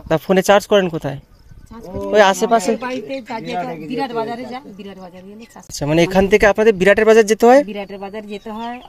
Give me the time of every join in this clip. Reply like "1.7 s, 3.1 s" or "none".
5.8 s